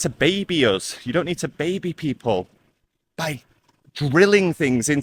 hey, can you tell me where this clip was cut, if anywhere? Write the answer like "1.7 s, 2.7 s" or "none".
none